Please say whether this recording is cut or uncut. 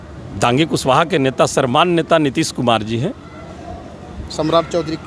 uncut